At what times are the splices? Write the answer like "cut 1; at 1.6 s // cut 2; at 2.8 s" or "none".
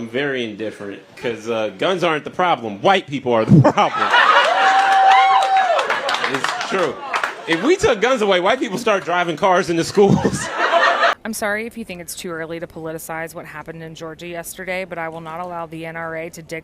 cut 1; at 11.1 s